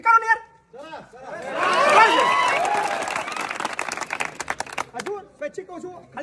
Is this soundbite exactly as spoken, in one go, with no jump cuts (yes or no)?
yes